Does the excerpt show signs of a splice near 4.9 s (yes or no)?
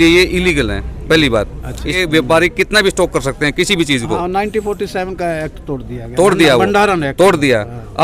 no